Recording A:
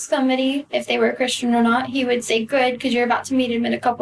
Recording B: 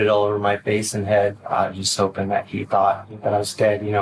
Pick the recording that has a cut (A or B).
B